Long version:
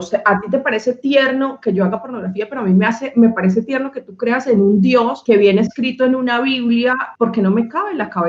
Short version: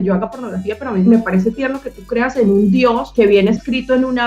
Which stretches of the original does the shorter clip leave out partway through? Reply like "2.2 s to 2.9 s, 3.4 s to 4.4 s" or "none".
2.8 s to 3.2 s